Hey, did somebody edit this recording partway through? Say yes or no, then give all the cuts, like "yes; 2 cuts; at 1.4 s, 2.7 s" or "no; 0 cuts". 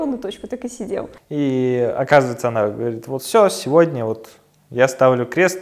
yes; 1 cut; at 1.2 s